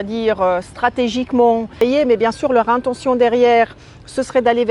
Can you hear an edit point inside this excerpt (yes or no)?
yes